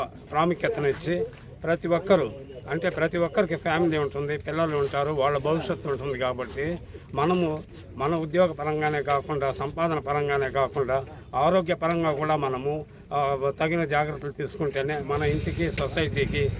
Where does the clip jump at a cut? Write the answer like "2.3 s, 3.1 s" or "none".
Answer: none

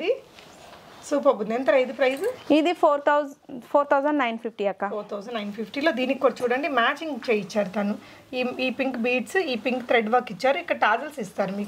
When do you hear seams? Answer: none

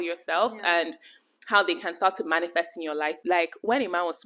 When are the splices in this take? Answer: 3.2 s

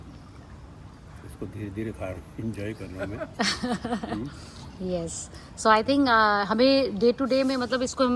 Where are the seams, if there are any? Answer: none

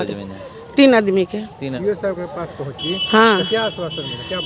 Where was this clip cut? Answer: 1.6 s

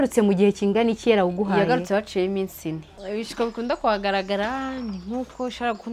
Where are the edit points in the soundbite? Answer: 2.9 s

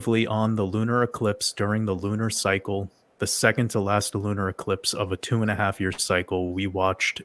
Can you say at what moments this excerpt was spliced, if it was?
none

